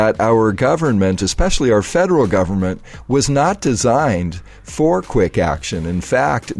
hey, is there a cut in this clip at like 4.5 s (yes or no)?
no